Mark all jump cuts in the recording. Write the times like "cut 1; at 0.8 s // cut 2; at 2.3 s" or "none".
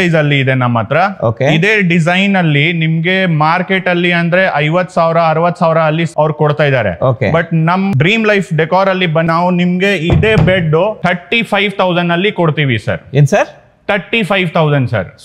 cut 1; at 6.1 s // cut 2; at 7.9 s // cut 3; at 9.3 s // cut 4; at 11.0 s